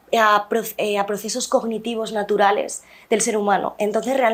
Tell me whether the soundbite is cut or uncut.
uncut